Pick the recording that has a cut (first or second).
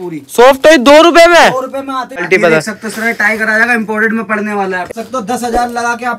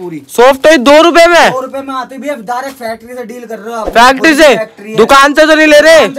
first